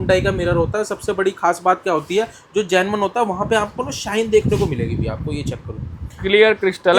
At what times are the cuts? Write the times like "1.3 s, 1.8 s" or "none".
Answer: none